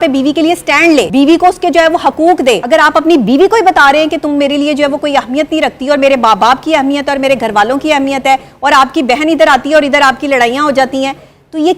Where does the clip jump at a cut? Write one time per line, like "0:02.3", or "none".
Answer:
0:01.1
0:02.6